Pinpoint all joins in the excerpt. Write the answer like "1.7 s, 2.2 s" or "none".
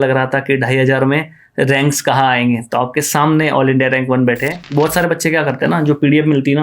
4.5 s